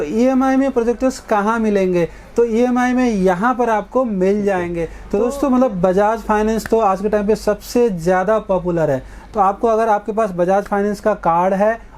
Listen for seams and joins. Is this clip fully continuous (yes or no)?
no